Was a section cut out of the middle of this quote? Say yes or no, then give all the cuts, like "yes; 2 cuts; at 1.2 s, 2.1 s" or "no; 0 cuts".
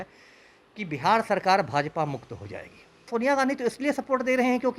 yes; 1 cut; at 3.1 s